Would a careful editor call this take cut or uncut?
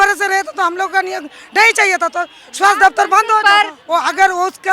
cut